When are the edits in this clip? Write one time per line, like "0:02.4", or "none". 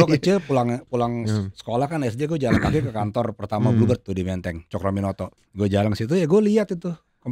0:05.3